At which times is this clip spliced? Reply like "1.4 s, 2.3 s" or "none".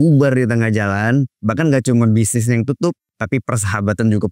3.1 s

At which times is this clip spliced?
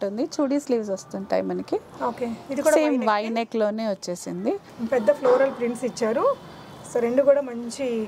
4.7 s

